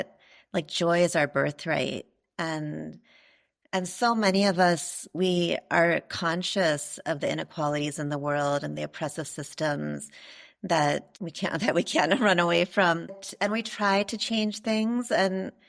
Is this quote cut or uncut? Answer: cut